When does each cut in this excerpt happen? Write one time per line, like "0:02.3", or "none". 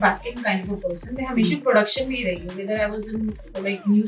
none